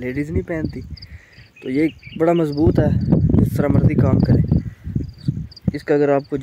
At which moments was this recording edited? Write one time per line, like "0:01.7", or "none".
none